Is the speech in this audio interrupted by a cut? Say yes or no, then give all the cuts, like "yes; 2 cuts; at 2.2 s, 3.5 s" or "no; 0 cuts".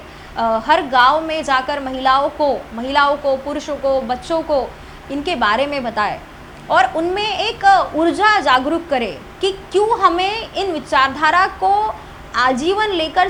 no; 0 cuts